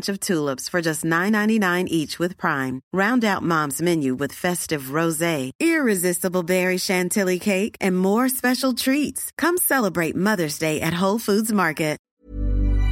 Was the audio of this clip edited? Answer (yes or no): yes